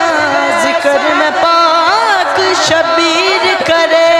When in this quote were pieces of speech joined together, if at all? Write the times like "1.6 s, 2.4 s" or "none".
none